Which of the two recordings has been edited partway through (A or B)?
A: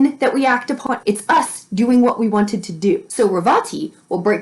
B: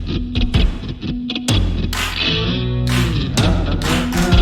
A